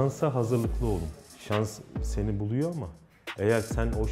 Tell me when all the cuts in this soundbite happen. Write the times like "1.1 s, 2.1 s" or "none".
1.3 s